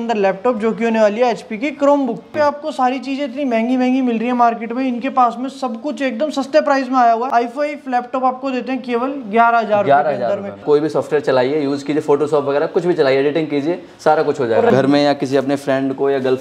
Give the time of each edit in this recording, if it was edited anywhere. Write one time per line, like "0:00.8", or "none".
0:02.3
0:07.3
0:10.6
0:14.7